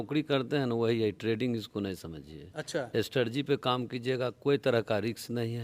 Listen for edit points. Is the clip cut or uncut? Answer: uncut